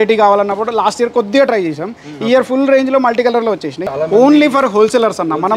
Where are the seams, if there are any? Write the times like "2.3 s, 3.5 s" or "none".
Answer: 3.8 s